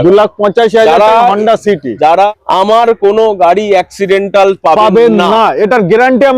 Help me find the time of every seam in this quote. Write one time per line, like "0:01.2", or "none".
0:02.3